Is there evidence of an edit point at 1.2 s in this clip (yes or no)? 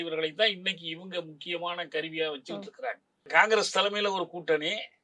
no